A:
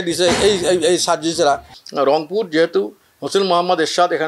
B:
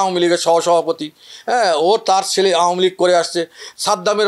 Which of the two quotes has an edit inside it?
A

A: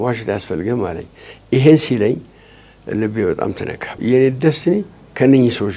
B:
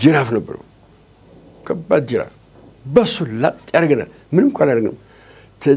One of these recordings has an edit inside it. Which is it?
A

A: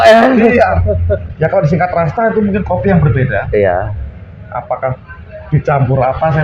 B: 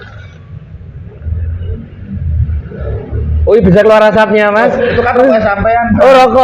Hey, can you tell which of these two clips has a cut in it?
A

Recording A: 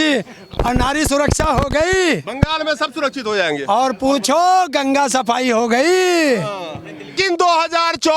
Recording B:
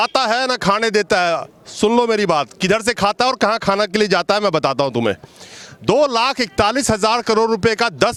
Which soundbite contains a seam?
A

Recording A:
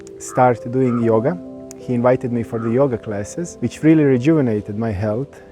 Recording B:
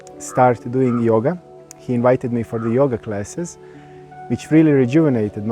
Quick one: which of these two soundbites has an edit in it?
A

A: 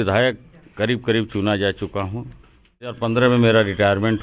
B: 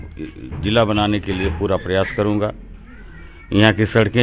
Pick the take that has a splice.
A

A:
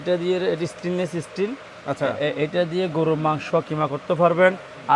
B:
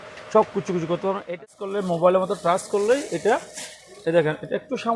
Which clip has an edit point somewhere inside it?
B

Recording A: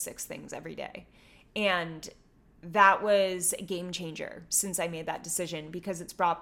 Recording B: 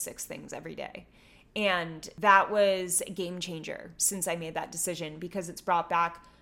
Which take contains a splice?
B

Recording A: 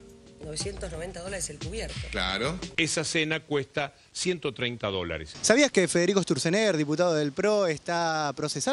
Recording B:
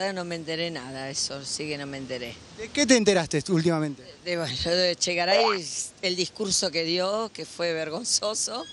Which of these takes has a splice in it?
A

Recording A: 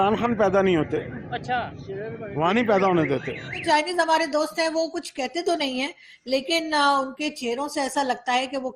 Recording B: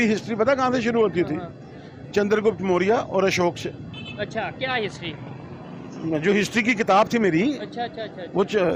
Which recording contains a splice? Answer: A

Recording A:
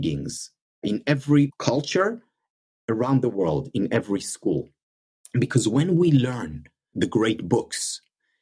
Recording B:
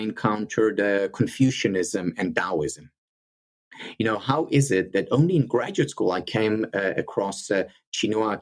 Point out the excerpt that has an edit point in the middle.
A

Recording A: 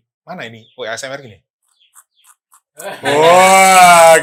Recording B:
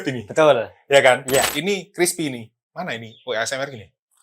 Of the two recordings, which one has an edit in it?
B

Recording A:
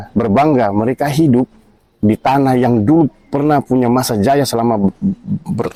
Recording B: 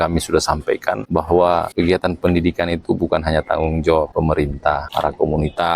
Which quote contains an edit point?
B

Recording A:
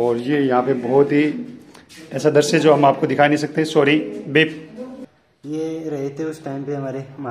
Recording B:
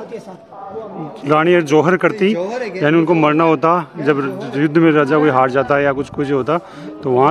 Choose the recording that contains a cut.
A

